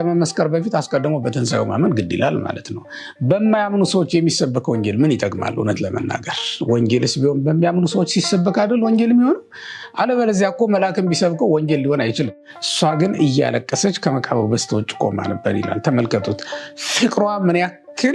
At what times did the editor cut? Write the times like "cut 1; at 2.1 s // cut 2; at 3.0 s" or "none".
cut 1; at 12.3 s